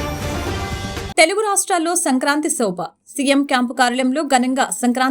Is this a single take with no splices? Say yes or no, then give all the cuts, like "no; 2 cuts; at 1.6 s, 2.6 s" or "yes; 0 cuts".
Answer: no; 1 cut; at 1.1 s